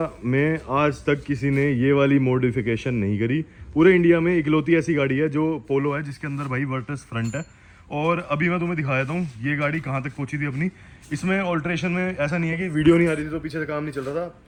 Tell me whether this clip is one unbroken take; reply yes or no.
yes